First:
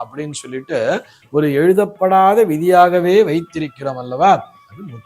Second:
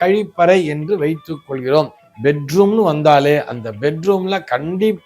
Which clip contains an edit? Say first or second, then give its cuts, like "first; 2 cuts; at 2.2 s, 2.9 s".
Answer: second; 1 cut; at 2.0 s